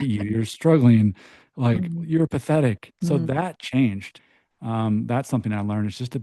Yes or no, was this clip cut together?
yes